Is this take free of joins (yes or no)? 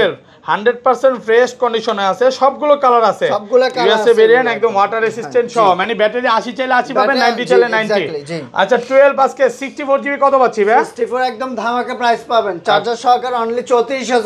yes